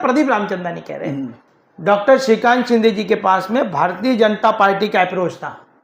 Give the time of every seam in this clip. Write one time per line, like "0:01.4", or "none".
0:01.5